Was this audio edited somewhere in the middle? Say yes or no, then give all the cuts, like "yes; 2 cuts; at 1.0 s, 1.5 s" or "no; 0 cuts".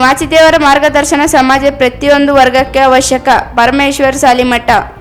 no; 0 cuts